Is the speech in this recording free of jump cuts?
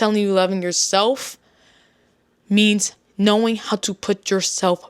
yes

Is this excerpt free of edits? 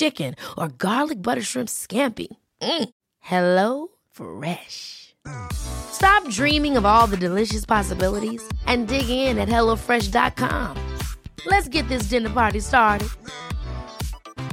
yes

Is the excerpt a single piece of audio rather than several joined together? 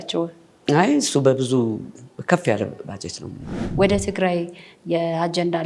no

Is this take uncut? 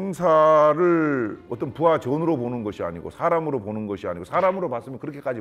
yes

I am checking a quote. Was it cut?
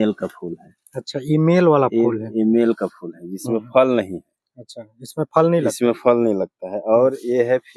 no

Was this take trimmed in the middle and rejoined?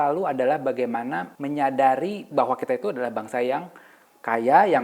yes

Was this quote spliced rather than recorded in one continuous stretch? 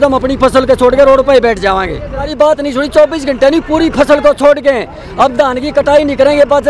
yes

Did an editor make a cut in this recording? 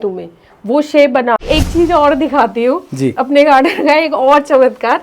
yes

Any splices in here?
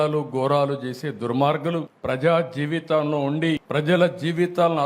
yes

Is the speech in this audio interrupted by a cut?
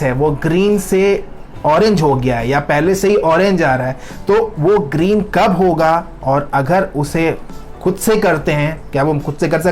no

